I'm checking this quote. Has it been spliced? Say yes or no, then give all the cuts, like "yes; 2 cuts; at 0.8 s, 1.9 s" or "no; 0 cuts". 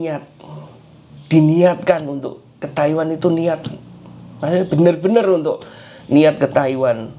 no; 0 cuts